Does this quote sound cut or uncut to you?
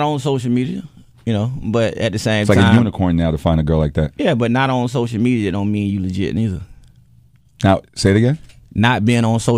cut